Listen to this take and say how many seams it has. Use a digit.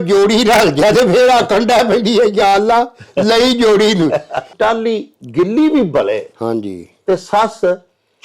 1